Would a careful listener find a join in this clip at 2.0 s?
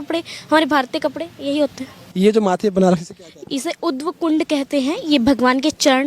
yes; 1 cut; at 2.0 s

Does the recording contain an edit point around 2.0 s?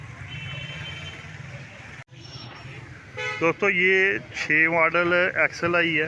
yes; 1 cut; at 2.0 s

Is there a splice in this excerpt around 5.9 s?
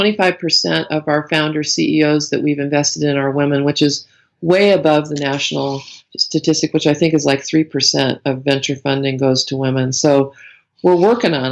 no; 0 cuts

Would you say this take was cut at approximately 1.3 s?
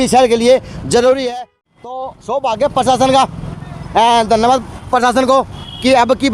yes; 1 cut; at 1.3 s

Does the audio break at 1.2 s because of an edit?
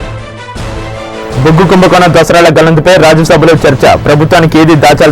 no; 0 cuts

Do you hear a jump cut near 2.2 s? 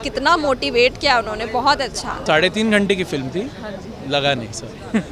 yes; 1 cut; at 2.2 s

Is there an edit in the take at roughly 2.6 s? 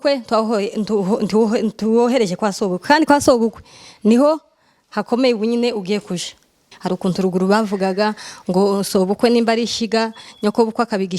no; 1 cut; at 6.7 s

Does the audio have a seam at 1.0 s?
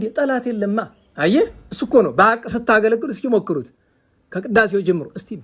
yes; 1 cut; at 1.0 s

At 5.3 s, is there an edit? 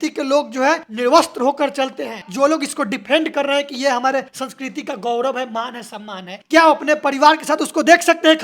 no; 1 cut; at 2.2 s

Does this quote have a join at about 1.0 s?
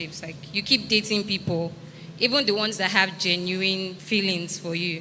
no; 1 cut; at 4.0 s

